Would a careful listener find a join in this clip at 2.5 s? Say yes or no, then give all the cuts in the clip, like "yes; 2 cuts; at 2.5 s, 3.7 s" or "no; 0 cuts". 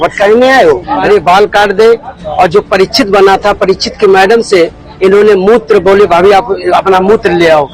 no; 1 cut; at 1.0 s